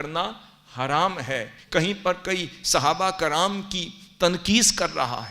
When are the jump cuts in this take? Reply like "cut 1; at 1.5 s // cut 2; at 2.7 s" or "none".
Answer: cut 1; at 1.6 s